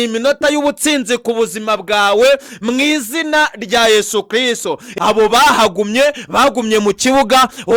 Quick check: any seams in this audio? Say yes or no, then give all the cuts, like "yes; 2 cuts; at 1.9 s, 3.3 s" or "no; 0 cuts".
yes; 1 cut; at 4.9 s